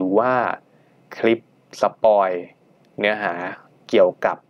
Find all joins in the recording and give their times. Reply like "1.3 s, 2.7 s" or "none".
none